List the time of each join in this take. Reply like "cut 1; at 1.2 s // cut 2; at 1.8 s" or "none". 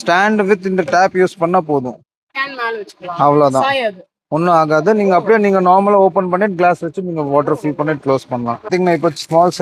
cut 1; at 8.7 s